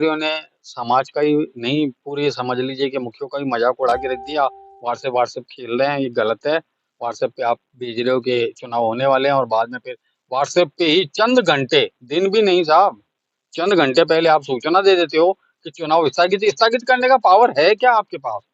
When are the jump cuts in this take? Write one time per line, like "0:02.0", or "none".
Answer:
none